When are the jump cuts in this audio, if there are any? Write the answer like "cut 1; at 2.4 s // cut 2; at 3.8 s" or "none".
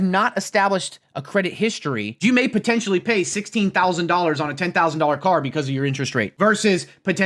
cut 1; at 2.2 s // cut 2; at 6.3 s